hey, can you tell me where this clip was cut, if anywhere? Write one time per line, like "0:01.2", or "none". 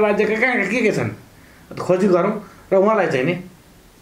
none